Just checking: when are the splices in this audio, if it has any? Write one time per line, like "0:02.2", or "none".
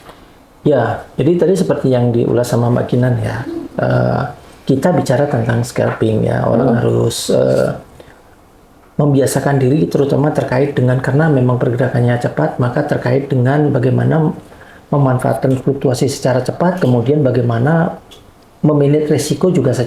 none